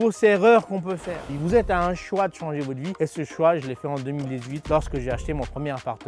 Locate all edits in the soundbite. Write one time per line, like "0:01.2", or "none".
0:01.3